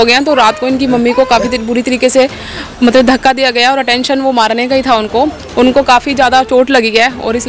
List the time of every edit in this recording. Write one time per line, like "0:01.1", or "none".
none